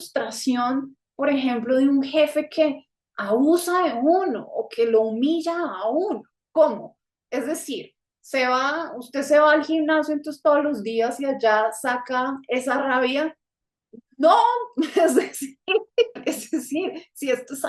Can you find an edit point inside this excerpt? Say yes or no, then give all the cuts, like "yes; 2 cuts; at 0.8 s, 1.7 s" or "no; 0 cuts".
no; 0 cuts